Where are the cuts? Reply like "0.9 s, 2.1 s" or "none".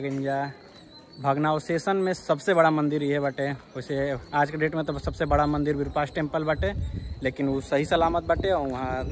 none